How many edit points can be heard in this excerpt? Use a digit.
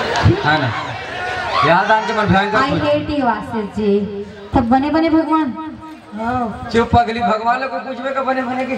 1